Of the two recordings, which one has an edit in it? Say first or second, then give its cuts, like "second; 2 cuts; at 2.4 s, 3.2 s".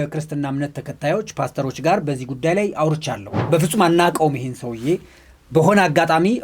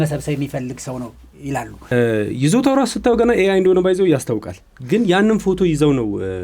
second; 1 cut; at 1.9 s